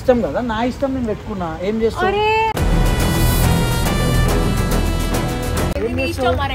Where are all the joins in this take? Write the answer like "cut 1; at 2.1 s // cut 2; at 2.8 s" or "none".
none